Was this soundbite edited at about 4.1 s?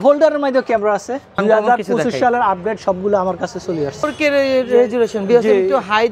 yes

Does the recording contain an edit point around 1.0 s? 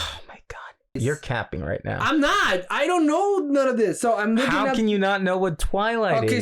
yes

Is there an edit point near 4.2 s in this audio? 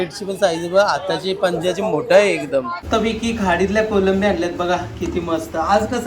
no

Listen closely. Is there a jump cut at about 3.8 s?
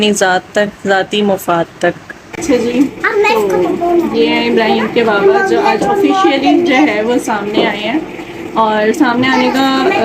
no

